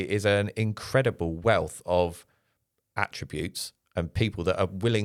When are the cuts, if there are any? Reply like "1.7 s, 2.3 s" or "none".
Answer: none